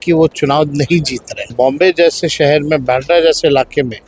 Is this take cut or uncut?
cut